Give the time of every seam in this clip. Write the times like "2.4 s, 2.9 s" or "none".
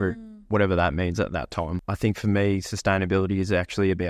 1.7 s